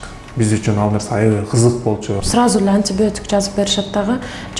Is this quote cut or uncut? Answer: cut